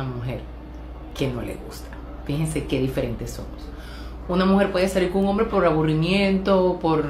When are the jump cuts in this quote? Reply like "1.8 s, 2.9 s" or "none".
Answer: 2.6 s